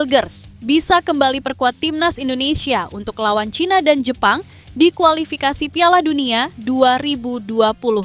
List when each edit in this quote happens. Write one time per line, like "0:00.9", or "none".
none